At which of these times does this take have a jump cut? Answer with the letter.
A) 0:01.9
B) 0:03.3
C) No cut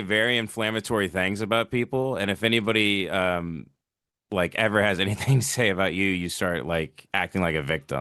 C